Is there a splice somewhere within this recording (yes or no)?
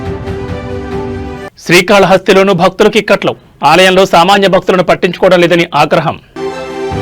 yes